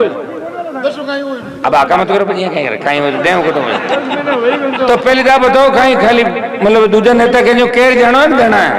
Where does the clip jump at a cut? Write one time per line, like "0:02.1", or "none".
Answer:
none